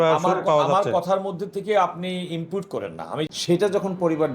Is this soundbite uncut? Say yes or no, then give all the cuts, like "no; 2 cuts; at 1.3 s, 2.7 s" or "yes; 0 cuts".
no; 1 cut; at 3.3 s